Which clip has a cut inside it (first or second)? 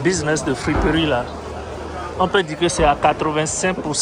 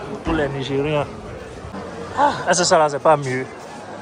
second